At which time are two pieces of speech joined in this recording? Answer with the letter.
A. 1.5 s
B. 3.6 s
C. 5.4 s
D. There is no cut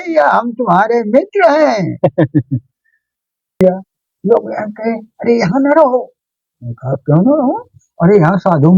B